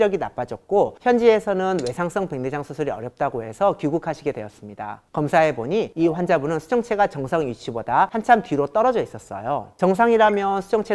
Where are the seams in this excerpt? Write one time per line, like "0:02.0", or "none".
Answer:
none